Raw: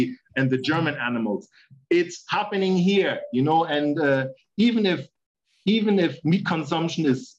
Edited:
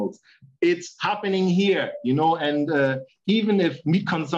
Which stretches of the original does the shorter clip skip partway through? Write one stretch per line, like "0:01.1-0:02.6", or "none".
0:04.4-0:05.5